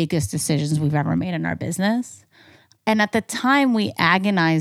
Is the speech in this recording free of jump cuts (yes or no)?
yes